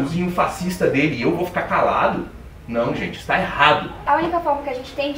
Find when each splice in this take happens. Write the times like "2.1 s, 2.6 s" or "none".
4.0 s